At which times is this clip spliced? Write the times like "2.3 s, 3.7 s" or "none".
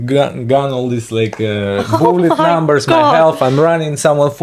none